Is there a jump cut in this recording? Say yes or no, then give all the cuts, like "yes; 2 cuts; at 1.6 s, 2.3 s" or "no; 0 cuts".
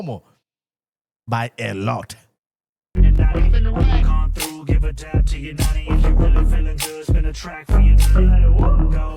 no; 0 cuts